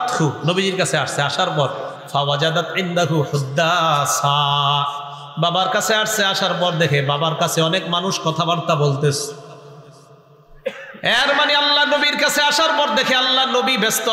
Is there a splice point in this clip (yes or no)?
no